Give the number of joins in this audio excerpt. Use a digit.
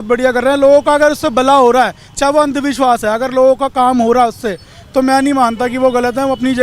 0